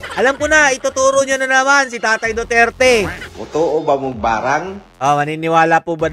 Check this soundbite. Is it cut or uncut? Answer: cut